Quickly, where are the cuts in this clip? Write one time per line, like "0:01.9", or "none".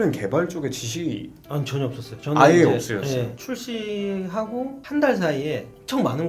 0:03.4